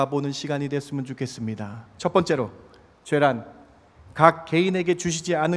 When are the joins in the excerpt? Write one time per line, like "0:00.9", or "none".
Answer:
0:01.8